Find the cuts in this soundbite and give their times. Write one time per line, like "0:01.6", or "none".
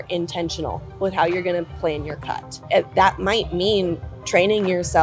0:02.7